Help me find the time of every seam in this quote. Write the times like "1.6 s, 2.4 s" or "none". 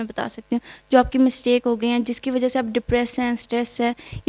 none

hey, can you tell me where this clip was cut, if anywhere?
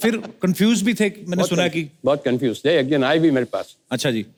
none

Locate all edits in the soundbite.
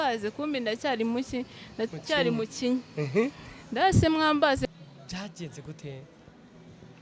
4.6 s

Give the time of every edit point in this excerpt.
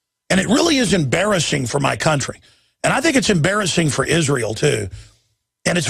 2.0 s

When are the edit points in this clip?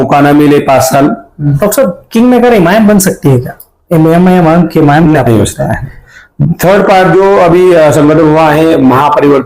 1.5 s, 5.2 s

